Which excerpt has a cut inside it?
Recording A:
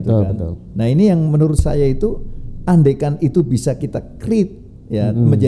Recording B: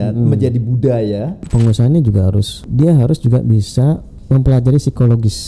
B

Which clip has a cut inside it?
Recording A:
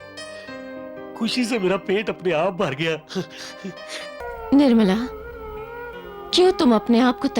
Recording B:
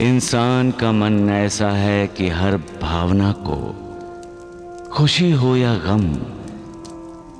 A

